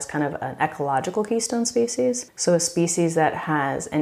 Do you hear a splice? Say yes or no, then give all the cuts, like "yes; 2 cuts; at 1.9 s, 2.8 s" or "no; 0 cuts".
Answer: no; 0 cuts